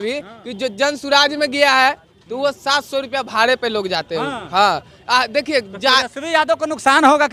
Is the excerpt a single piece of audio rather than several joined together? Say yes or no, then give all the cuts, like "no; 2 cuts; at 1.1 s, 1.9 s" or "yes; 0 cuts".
yes; 0 cuts